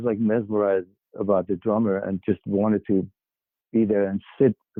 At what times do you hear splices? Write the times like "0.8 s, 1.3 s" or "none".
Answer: none